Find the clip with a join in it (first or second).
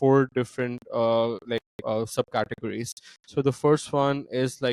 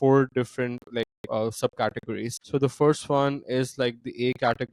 second